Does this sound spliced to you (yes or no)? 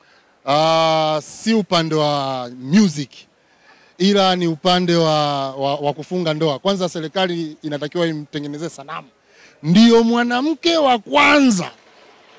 no